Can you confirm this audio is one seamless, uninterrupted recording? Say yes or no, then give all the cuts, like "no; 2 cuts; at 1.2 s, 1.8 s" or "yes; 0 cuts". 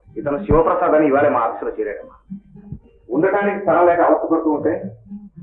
yes; 0 cuts